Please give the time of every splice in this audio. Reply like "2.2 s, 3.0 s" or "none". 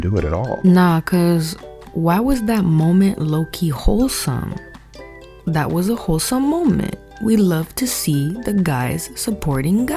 none